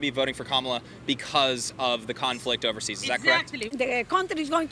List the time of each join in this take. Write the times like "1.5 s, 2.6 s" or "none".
3.7 s